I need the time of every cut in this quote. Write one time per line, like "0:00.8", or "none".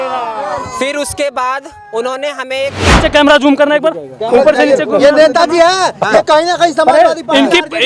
0:02.9